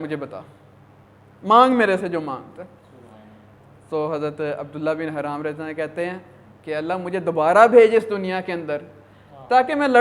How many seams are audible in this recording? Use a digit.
0